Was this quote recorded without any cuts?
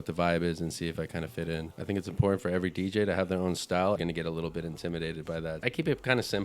no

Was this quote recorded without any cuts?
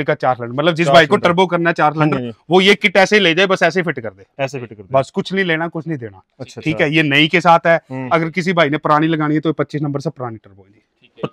yes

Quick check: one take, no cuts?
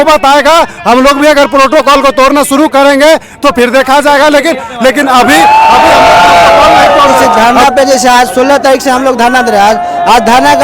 no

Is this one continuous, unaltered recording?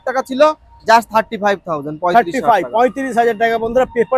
yes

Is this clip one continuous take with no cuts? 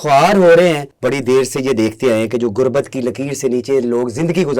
no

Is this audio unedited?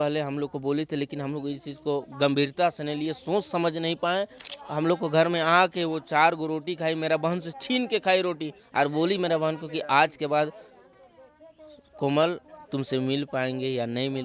yes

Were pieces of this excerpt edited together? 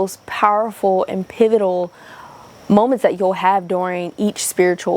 no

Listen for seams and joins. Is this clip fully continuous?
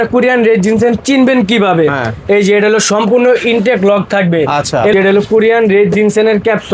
no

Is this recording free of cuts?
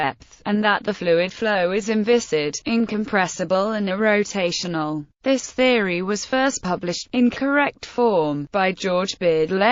no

